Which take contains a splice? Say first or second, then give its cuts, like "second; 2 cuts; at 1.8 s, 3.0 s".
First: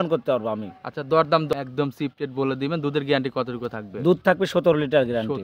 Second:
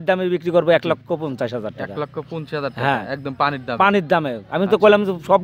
first; 1 cut; at 1.5 s